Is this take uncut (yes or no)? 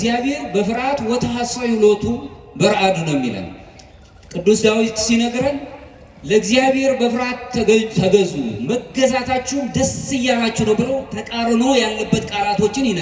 yes